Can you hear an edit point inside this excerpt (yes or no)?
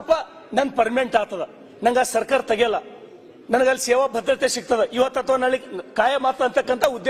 no